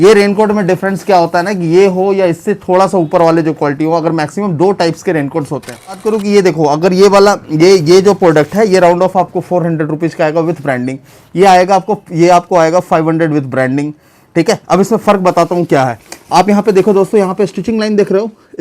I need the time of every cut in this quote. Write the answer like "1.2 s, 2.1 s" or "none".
6.0 s